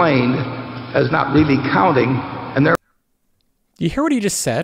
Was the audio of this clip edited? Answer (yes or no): no